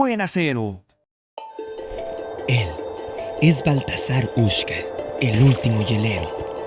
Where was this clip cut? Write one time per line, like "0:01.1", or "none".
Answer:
0:01.1